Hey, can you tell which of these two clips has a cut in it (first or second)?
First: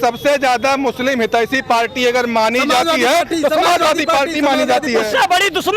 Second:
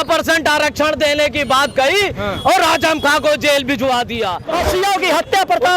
second